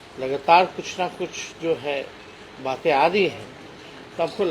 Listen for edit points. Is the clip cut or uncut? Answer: uncut